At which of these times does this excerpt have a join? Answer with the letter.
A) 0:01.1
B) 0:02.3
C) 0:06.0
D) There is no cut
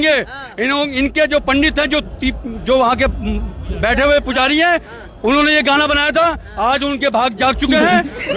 D